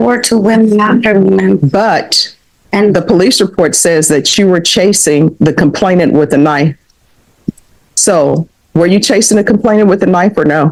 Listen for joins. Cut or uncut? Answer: uncut